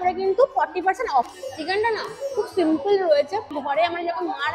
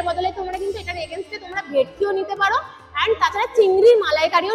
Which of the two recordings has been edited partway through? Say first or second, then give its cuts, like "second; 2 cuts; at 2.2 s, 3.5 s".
first; 2 cuts; at 1.3 s, 3.5 s